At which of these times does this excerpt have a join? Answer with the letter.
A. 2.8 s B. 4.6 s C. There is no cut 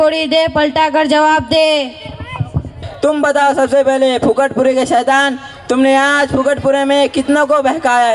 A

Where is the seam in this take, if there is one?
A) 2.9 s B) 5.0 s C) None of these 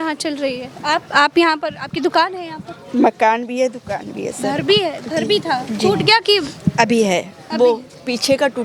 C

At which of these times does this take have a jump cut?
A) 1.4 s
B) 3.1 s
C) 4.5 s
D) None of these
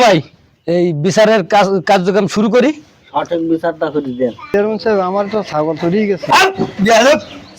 C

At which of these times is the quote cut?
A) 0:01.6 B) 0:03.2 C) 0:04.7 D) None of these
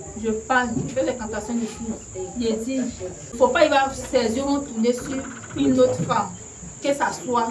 B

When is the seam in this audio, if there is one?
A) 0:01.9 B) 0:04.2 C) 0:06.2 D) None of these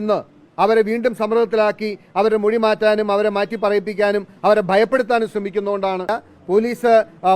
C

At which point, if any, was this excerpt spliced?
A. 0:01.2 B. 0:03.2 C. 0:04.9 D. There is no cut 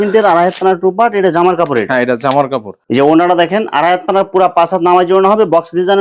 D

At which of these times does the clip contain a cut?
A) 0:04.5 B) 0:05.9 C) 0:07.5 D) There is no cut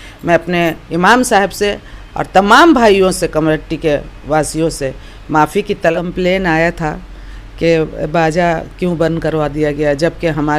B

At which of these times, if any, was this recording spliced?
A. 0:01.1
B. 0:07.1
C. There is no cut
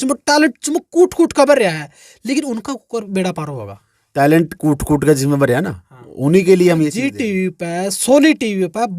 B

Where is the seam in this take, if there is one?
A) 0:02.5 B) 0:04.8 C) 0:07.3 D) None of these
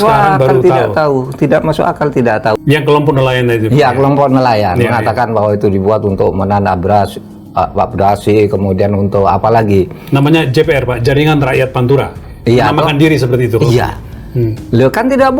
A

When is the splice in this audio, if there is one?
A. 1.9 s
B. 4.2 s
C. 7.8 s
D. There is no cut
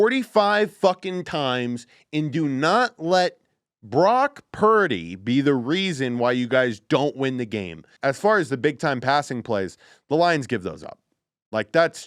C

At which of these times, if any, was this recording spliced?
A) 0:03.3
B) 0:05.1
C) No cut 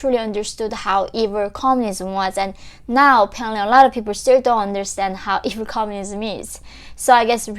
C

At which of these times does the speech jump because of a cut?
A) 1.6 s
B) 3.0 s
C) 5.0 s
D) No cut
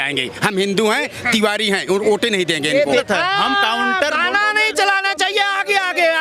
B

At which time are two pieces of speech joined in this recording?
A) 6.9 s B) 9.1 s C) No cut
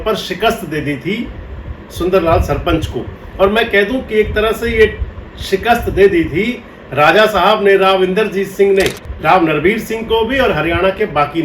B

